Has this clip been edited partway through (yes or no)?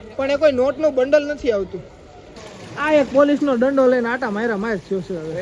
yes